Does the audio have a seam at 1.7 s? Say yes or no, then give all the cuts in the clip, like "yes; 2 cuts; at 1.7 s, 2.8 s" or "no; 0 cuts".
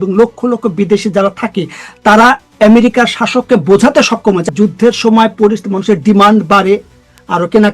no; 1 cut; at 4.5 s